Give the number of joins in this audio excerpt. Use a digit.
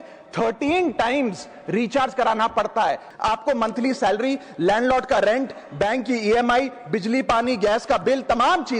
1